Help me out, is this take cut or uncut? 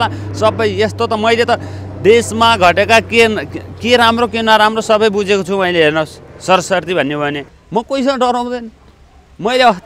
cut